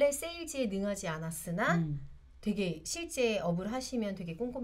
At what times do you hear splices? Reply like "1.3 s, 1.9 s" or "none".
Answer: none